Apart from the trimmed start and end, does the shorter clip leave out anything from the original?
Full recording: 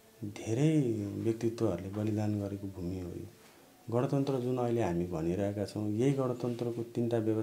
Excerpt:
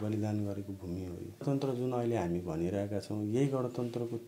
yes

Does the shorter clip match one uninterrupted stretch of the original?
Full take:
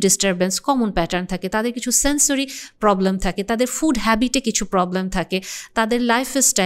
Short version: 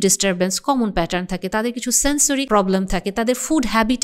no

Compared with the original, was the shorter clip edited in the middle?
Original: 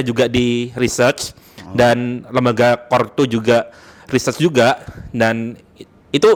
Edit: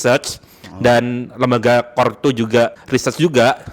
yes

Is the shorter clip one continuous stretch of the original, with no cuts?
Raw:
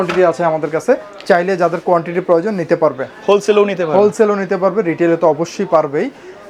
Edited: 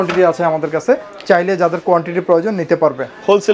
yes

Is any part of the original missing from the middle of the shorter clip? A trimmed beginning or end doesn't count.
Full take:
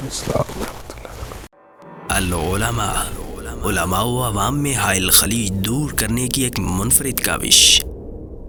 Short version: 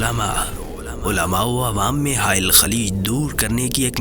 no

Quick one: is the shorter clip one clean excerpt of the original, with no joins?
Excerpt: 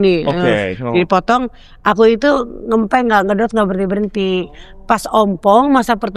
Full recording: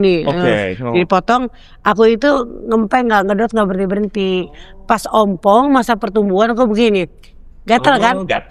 yes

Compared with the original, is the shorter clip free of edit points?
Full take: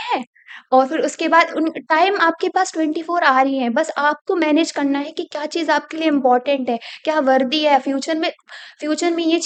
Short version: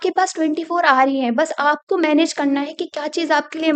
yes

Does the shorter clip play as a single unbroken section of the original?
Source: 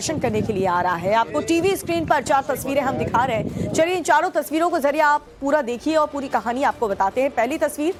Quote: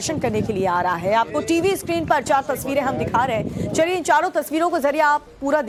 yes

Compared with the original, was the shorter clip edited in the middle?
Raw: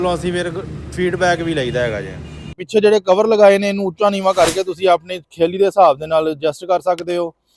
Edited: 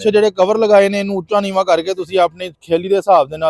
no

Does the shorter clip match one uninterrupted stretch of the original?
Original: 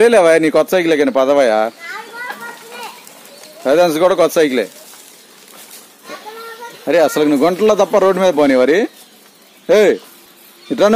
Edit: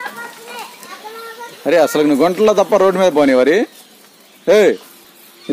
no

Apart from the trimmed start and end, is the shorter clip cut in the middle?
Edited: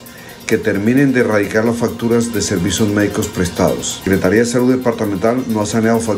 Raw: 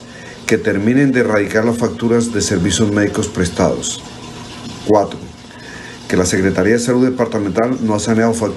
yes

